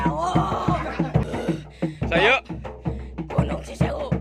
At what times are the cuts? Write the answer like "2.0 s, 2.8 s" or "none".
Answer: 1.2 s